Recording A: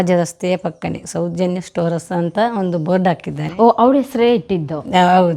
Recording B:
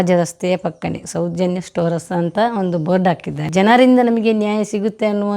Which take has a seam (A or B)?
B